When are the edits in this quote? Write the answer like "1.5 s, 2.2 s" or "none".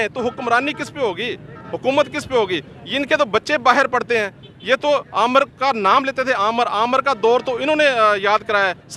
none